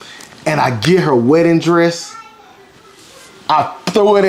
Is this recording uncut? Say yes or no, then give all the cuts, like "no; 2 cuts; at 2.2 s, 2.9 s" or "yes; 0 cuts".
yes; 0 cuts